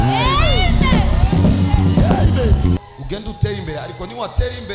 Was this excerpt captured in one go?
no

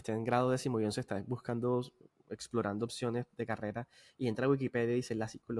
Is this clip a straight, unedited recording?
yes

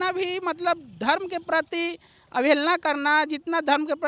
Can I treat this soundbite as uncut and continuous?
yes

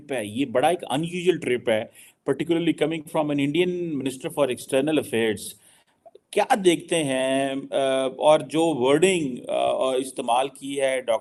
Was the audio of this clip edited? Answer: no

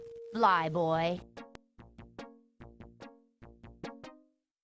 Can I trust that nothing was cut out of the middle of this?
yes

